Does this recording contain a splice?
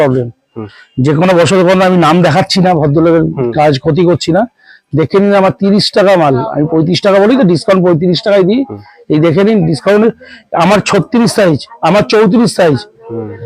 no; 0 cuts

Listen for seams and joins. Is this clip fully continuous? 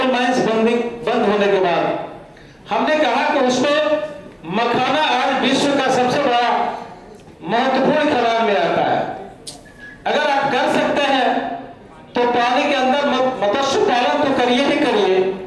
yes; 0 cuts

